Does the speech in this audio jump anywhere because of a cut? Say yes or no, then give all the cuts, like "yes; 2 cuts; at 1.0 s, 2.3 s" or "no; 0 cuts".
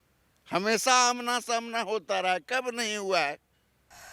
no; 0 cuts